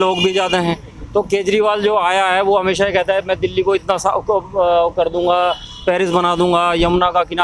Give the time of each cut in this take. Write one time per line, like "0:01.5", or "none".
none